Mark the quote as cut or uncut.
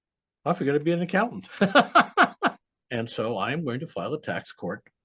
cut